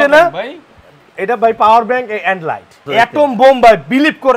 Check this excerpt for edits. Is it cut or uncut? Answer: cut